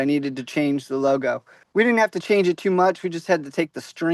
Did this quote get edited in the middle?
yes; 1 cut; at 1.5 s

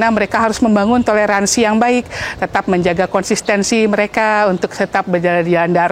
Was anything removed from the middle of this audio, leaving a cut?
no; 0 cuts

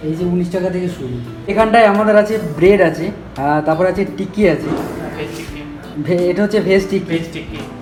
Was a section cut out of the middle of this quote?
no; 0 cuts

